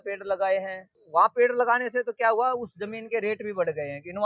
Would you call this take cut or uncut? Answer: cut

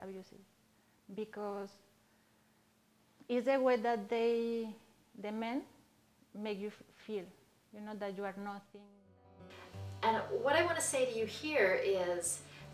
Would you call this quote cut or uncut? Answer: cut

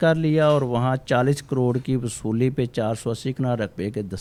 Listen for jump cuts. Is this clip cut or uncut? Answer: uncut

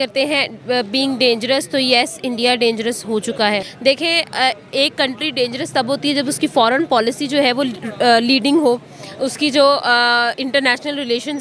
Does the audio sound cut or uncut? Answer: cut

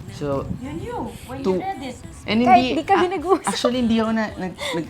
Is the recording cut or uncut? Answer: cut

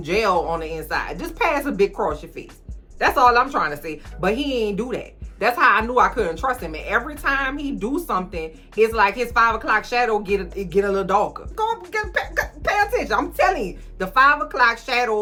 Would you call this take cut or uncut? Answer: uncut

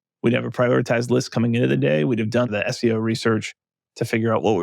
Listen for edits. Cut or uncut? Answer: cut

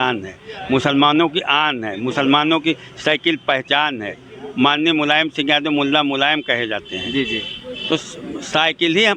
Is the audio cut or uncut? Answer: uncut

